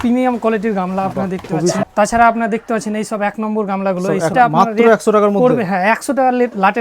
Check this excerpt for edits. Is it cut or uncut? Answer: cut